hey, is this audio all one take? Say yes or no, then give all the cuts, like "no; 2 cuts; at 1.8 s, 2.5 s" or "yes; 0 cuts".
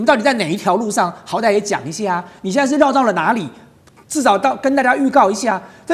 yes; 0 cuts